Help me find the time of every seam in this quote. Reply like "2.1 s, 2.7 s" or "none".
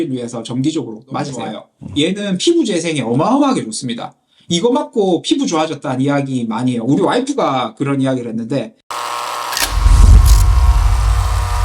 1.6 s, 8.8 s